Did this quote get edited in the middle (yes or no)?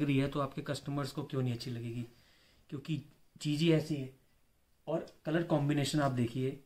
no